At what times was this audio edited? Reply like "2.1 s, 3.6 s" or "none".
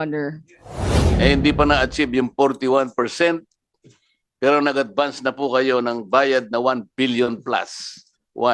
1.0 s